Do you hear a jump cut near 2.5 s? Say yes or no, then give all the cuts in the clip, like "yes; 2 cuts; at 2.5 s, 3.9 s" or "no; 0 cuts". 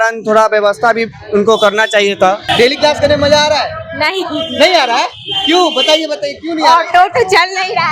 yes; 1 cut; at 2.5 s